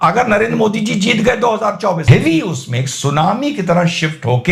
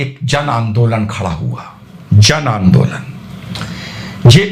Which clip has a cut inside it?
first; 1 cut; at 2.0 s

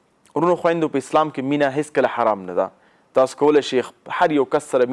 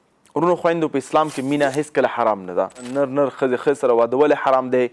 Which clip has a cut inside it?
second; 1 cut; at 2.9 s

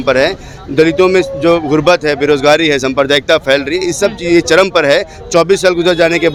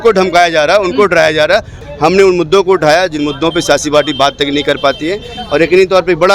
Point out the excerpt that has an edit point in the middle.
second; 1 cut; at 1.8 s

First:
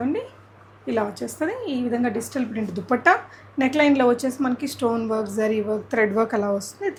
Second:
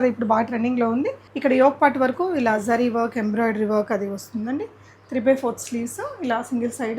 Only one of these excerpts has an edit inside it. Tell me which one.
second; 1 cut; at 1.2 s

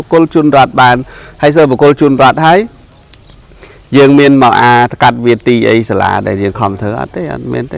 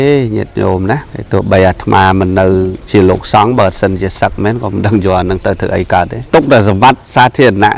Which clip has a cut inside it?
second; 3 cuts; at 1.1 s, 2.8 s, 6.2 s

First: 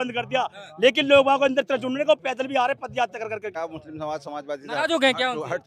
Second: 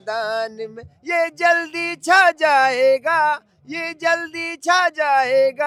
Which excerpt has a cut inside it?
first; 1 cut; at 3.6 s

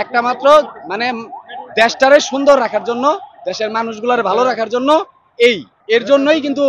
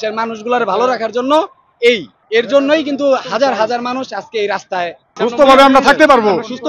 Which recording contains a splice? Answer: second; 1 cut; at 5.0 s

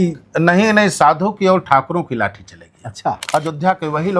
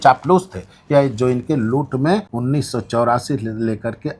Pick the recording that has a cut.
first; 1 cut; at 3.2 s

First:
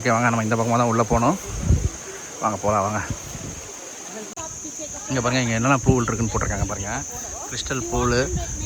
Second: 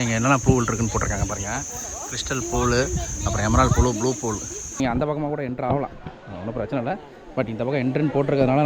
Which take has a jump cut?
second; 1 cut; at 4.8 s

